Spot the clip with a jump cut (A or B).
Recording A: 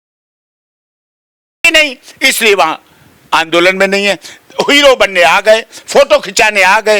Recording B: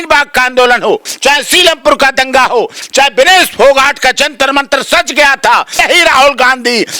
B